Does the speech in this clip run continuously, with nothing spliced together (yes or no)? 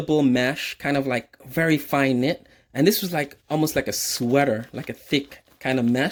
yes